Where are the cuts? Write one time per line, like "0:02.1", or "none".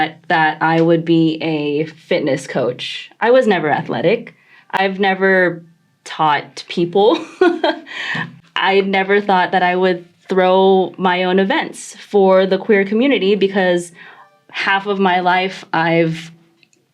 0:08.3